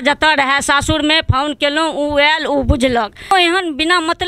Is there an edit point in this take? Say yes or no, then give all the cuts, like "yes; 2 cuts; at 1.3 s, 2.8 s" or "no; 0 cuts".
yes; 1 cut; at 3.3 s